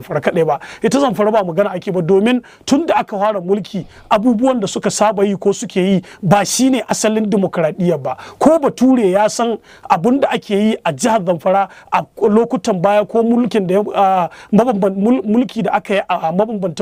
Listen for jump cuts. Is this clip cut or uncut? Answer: uncut